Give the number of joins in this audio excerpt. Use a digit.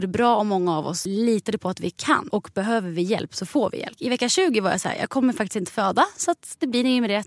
3